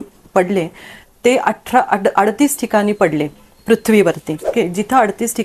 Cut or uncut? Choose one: cut